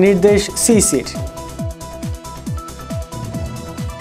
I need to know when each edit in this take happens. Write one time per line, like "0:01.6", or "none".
none